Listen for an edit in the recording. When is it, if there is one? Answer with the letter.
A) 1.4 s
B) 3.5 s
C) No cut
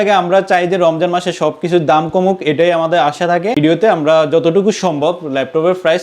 B